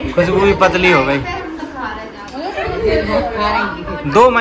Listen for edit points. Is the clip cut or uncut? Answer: uncut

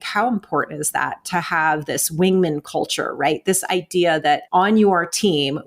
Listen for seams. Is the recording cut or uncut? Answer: cut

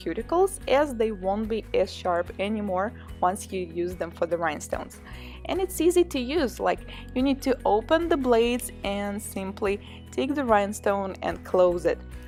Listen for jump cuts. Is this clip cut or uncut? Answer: uncut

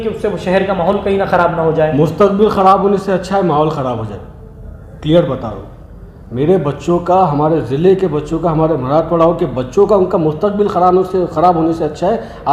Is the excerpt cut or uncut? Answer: uncut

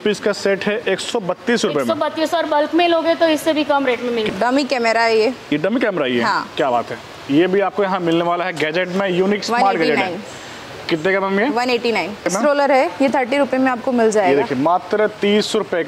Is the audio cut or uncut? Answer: cut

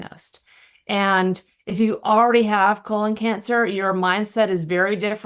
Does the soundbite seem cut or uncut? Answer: uncut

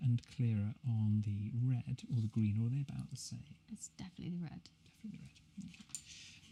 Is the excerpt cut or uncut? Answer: uncut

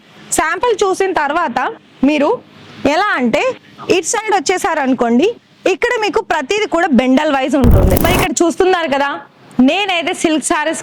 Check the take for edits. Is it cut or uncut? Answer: cut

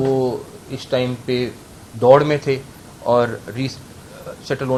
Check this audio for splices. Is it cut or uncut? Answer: uncut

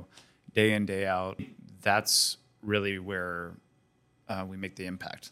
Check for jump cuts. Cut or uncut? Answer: cut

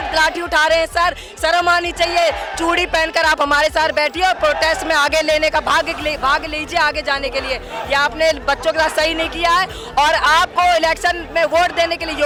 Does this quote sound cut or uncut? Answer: uncut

